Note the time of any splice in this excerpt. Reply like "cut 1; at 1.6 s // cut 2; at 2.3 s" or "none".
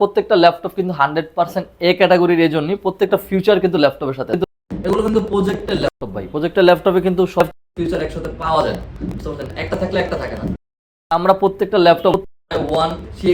none